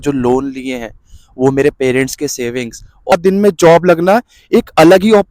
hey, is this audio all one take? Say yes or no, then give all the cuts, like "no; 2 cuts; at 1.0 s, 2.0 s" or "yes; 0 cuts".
no; 1 cut; at 3.1 s